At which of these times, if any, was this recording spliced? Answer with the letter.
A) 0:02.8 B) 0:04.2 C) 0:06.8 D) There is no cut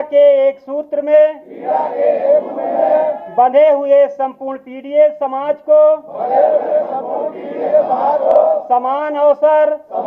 B